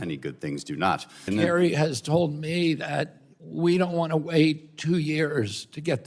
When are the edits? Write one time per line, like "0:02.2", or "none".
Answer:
0:01.3